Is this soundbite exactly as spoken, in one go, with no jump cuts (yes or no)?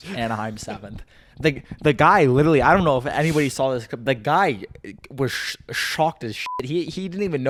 yes